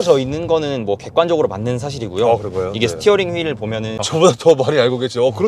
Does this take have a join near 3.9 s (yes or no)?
yes